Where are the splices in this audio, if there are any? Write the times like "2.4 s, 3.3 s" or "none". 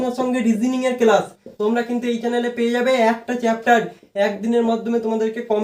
none